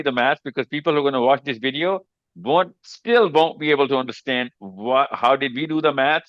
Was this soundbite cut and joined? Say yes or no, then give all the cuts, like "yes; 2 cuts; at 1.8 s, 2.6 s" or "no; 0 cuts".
no; 0 cuts